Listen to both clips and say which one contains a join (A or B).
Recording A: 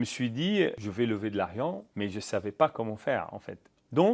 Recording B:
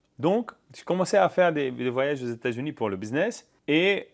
A